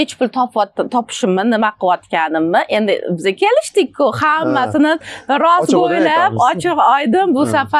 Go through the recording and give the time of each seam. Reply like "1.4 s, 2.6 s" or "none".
none